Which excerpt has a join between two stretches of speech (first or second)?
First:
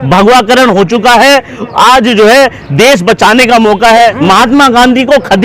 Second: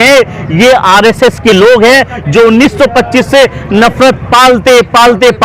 first